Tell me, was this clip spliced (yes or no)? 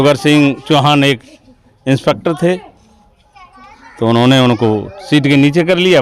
no